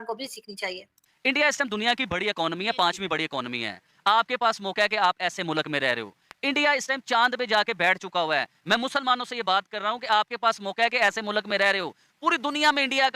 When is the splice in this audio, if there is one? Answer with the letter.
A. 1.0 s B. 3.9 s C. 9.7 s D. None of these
A